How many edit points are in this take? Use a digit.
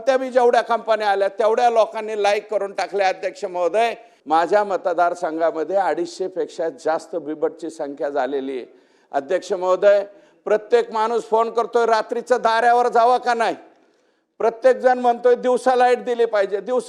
1